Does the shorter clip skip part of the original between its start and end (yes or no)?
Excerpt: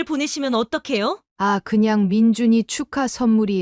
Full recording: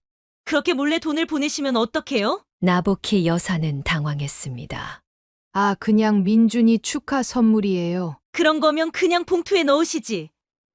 yes